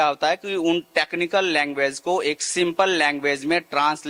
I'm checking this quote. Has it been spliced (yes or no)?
no